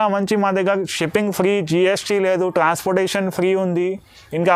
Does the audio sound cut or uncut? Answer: uncut